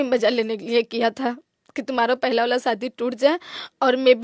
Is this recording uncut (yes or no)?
yes